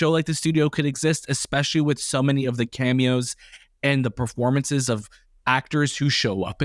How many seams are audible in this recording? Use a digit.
0